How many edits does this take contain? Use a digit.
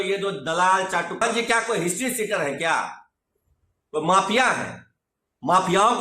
1